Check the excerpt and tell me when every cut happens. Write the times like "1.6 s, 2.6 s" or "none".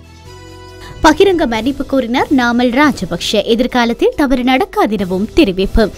0.9 s